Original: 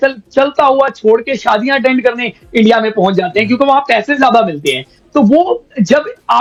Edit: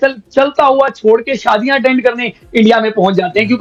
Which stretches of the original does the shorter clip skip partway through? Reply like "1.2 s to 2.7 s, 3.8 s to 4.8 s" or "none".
none